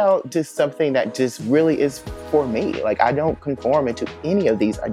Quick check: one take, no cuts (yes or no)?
yes